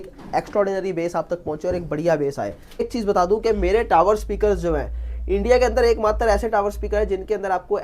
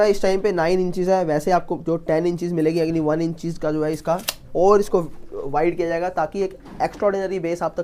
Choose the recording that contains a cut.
first; 1 cut; at 2.8 s

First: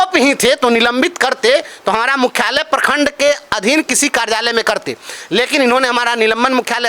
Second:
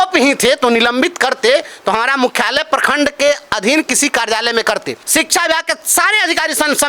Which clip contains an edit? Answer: second; 1 cut; at 5.0 s

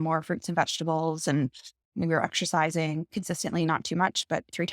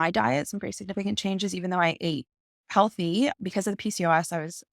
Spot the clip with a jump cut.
first; 2 cuts; at 1.9 s, 3.1 s

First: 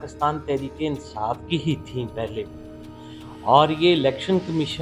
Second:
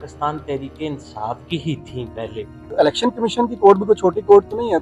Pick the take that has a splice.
second; 1 cut; at 2.7 s

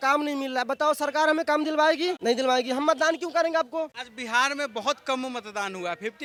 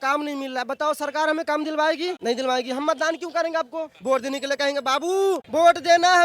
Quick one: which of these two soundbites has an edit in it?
second; 1 cut; at 3.9 s

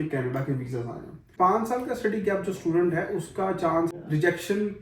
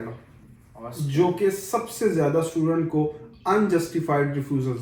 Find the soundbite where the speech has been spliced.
first; 2 cuts; at 1.3 s, 3.9 s

